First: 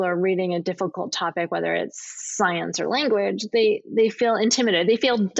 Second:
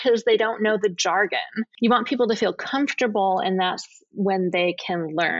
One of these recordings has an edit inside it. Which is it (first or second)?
second